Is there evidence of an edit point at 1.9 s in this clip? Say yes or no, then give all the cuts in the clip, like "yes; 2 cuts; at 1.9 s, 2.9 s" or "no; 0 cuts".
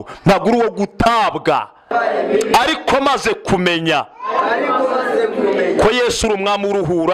yes; 1 cut; at 1.9 s